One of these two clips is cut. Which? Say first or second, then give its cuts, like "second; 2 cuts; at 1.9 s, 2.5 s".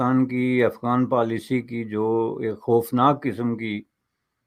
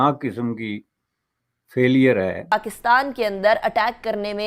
second; 1 cut; at 2.5 s